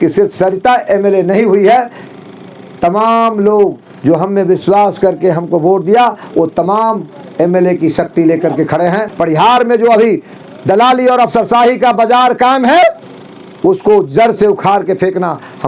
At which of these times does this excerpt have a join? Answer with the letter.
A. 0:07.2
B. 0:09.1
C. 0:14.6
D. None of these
B